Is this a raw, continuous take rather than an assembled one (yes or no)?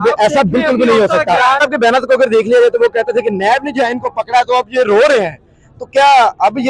no